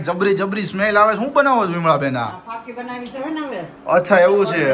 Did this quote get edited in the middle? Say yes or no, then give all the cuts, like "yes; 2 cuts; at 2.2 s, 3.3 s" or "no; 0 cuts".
no; 0 cuts